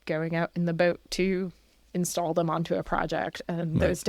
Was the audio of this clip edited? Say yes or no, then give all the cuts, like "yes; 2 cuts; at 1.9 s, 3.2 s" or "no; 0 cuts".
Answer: no; 0 cuts